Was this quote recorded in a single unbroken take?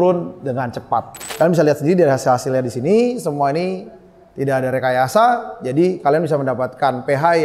no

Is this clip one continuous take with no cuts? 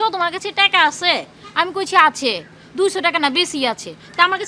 yes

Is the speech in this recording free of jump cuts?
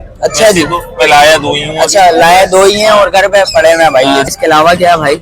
no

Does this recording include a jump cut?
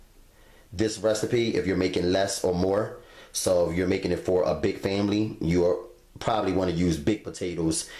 yes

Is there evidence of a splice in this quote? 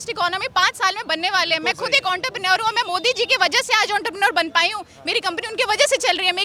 no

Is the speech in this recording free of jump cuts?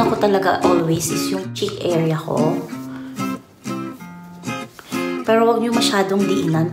no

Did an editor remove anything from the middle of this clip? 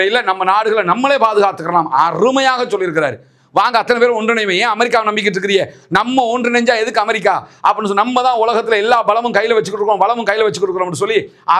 no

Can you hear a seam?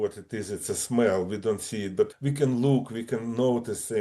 yes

